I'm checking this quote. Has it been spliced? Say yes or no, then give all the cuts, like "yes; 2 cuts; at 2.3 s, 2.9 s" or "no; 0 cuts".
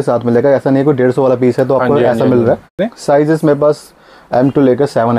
yes; 1 cut; at 2.9 s